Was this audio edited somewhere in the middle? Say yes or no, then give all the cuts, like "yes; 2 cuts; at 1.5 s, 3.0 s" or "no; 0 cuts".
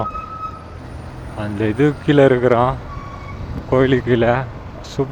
no; 0 cuts